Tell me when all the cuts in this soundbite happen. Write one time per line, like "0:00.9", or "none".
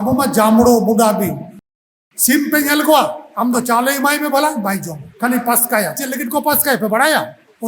0:01.6